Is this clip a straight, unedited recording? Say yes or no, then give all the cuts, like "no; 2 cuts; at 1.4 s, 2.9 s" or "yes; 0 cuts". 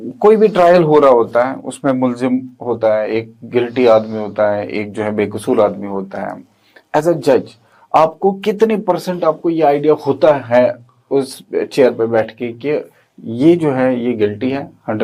yes; 0 cuts